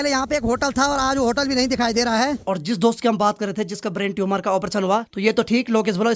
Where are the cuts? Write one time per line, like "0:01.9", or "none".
0:02.4
0:05.1

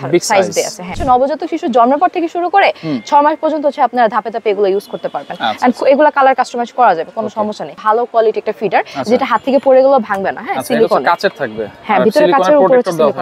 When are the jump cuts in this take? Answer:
0:00.9
0:07.7

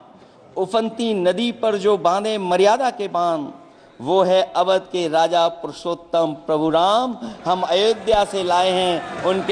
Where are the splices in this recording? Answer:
none

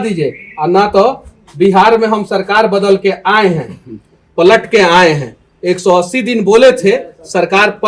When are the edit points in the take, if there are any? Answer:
none

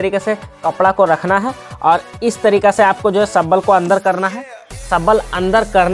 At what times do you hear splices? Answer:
none

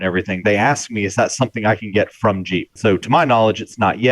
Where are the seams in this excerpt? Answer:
0:02.7

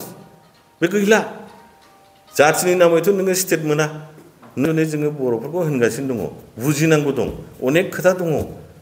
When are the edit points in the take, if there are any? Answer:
0:04.6

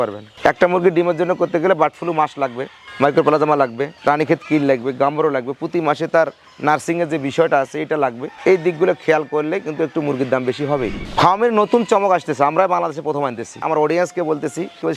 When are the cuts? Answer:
0:11.0
0:13.5

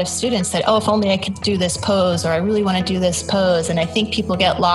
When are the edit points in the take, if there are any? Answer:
none

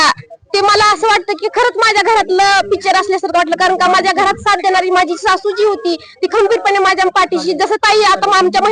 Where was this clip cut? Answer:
none

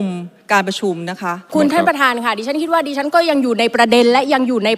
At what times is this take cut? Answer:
0:01.5

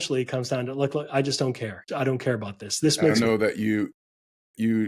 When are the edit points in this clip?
0:03.1

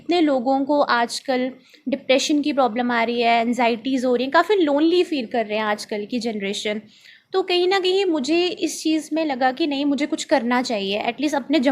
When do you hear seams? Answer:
none

